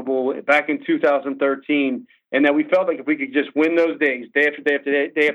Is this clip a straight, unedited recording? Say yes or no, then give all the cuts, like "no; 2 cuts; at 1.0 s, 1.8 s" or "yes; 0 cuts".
yes; 0 cuts